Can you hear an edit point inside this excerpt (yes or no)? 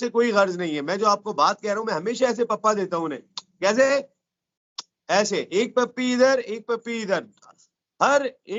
no